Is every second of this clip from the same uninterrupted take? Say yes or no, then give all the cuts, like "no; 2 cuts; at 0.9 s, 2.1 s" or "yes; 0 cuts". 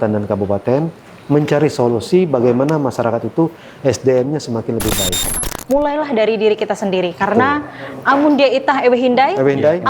no; 1 cut; at 5.5 s